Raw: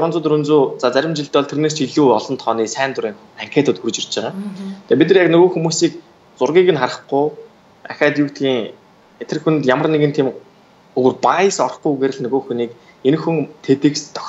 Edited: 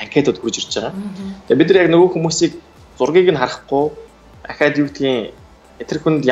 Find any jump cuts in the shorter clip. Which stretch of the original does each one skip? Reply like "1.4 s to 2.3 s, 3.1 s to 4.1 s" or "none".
none